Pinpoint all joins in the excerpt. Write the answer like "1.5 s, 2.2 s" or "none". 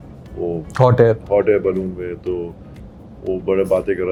none